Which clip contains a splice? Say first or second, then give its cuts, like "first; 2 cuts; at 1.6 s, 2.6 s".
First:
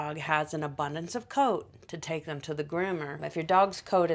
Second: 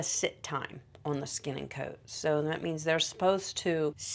first; 1 cut; at 3.2 s